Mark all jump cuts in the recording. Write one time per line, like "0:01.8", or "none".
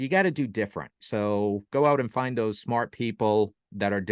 0:01.0